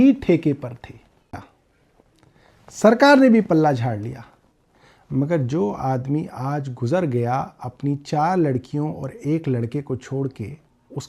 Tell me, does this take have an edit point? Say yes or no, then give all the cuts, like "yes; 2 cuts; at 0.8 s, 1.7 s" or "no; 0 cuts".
yes; 1 cut; at 1.3 s